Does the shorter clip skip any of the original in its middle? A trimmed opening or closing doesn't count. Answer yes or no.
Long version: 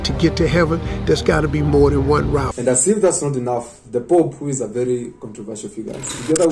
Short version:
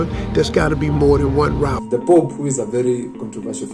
yes